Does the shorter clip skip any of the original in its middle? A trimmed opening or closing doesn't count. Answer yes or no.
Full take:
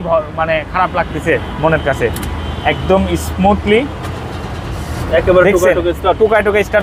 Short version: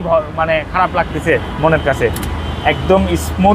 no